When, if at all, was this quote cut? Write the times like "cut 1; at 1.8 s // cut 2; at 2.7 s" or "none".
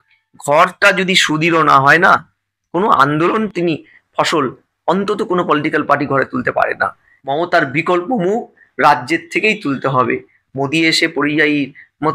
cut 1; at 7.1 s